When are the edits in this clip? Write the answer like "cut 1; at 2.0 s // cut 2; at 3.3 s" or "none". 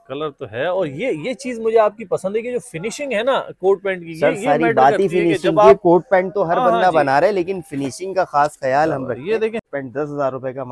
cut 1; at 9.7 s